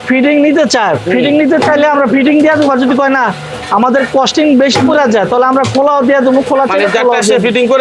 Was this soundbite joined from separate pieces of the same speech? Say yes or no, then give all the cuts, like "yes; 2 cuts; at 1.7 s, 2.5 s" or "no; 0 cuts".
no; 0 cuts